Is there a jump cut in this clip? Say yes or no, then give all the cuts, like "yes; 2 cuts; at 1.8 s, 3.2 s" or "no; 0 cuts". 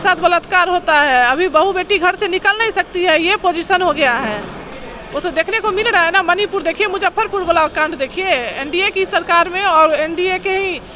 no; 0 cuts